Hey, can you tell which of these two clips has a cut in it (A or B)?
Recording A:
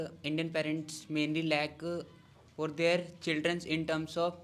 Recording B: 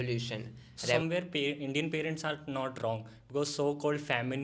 B